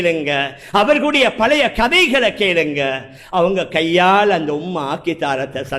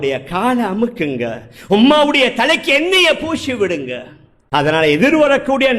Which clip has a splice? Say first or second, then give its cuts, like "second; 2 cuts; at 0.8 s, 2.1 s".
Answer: second; 1 cut; at 4.4 s